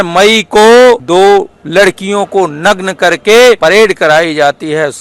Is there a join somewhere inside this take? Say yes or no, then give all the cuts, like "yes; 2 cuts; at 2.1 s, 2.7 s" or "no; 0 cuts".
yes; 2 cuts; at 1.0 s, 3.6 s